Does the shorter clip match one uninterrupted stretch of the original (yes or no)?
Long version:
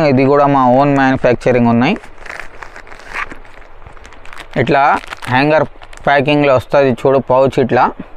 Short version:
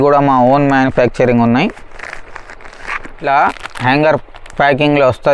no